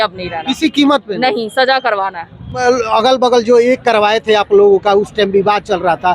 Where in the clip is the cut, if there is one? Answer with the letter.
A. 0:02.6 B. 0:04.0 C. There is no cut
A